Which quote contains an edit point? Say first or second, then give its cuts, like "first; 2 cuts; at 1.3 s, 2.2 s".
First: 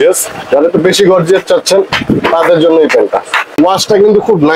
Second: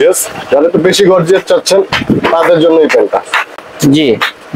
first; 1 cut; at 3.5 s